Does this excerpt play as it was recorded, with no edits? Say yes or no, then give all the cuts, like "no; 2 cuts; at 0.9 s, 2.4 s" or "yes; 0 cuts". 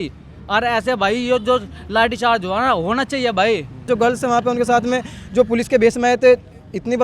no; 1 cut; at 3.9 s